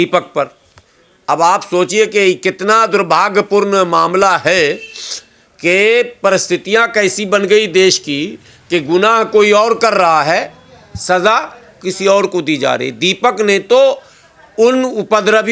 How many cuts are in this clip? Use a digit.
0